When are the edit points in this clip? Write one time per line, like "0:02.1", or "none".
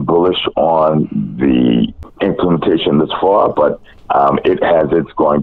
0:02.0